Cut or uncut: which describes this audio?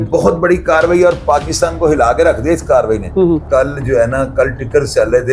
cut